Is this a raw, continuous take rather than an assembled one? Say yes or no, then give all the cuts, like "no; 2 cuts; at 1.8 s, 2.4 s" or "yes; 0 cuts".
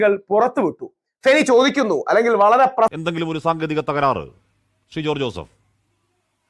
no; 1 cut; at 2.9 s